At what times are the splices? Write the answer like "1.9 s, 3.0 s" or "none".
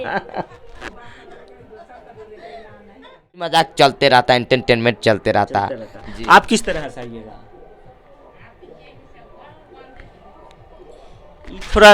3.5 s

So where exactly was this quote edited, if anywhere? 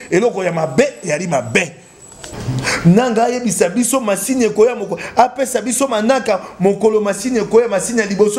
2.3 s

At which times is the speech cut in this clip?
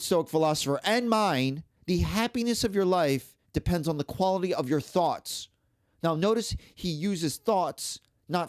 1.7 s

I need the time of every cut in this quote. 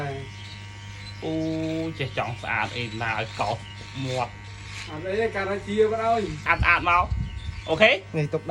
6.4 s

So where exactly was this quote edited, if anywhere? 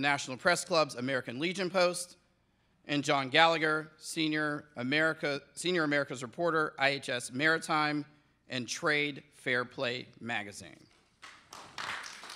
4.6 s

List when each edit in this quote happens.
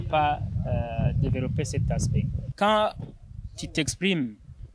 2.4 s

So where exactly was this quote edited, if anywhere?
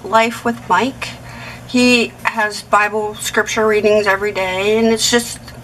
none

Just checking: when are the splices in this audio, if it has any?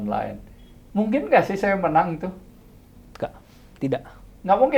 none

